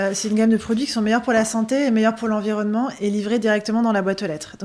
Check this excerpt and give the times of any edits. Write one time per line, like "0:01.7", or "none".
none